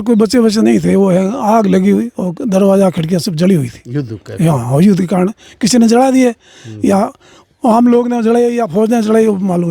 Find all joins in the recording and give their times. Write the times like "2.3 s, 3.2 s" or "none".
none